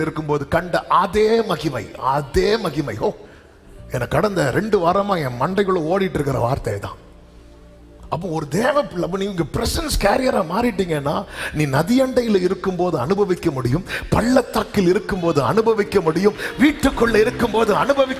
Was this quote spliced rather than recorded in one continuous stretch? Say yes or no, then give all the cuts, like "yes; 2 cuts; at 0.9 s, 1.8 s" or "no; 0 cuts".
no; 0 cuts